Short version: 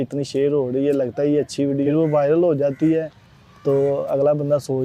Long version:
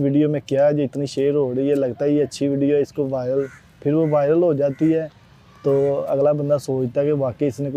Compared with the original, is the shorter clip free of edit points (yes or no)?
no